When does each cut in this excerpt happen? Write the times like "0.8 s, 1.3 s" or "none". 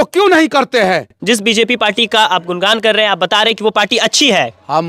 1.1 s